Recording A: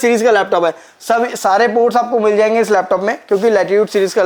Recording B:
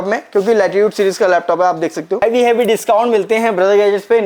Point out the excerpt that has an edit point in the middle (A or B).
B